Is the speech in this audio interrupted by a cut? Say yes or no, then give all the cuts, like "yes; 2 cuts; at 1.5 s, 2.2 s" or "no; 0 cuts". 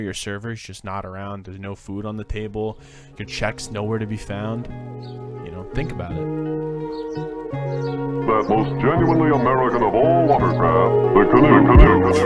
yes; 1 cut; at 4.7 s